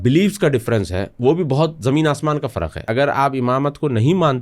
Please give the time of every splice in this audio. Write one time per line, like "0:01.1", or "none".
0:02.8